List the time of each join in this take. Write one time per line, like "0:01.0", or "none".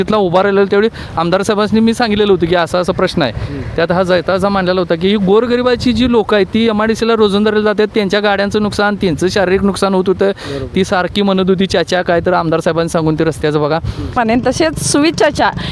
0:14.1